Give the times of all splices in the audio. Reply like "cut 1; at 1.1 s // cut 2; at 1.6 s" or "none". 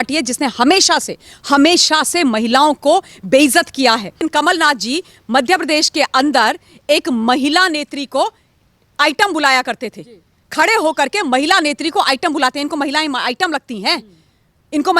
cut 1; at 4.3 s